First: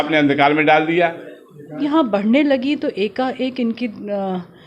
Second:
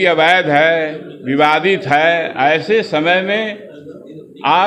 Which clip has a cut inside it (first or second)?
first